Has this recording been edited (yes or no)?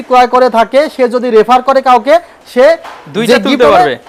no